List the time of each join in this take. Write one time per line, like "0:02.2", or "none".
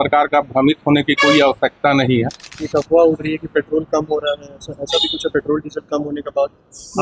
0:02.5